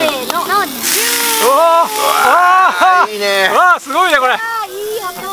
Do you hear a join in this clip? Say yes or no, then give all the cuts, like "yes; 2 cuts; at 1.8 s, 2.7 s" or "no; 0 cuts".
no; 0 cuts